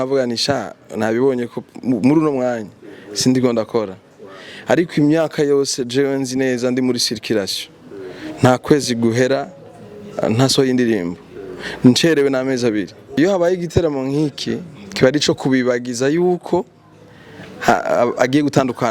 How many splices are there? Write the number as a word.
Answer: one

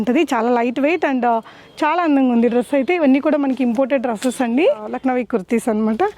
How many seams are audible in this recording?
one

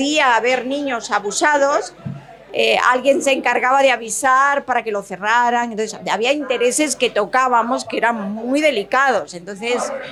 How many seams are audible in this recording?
zero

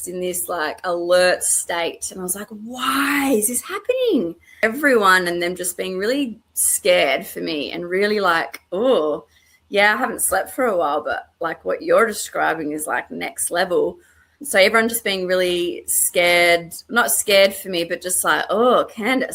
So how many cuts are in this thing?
two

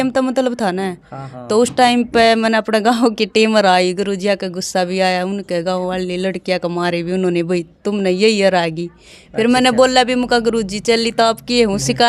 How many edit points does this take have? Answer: zero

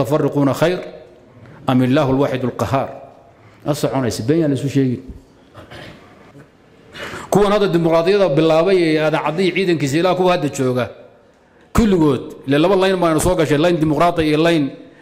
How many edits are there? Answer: one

